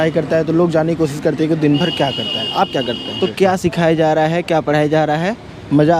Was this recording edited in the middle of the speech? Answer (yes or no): yes